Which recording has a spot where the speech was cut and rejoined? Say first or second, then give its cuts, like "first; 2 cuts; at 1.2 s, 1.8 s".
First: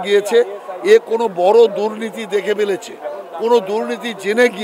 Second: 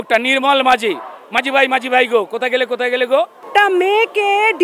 second; 1 cut; at 3.5 s